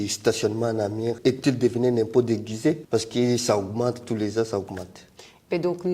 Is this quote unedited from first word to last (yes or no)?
no